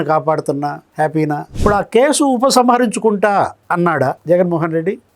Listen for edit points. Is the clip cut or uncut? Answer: cut